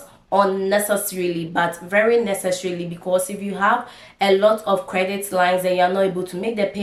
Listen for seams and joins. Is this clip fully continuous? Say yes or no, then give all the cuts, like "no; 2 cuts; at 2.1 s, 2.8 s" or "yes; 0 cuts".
yes; 0 cuts